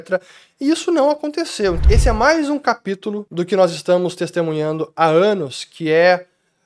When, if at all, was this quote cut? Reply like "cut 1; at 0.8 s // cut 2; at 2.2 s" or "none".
cut 1; at 1.8 s